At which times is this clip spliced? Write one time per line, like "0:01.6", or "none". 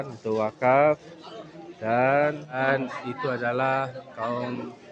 0:02.6